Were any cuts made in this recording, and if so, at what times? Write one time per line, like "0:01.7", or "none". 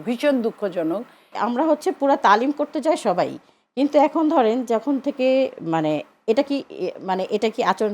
0:01.3